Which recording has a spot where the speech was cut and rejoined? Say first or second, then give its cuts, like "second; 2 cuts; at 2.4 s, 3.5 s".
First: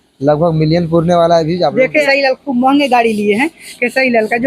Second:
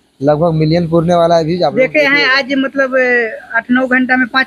first; 1 cut; at 2.1 s